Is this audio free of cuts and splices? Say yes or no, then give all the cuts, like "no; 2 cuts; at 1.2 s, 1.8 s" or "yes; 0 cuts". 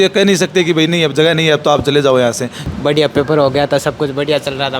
no; 1 cut; at 2.6 s